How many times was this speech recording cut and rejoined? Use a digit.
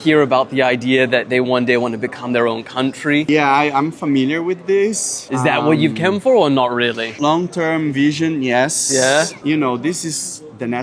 0